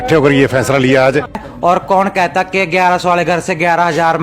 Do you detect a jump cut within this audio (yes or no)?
yes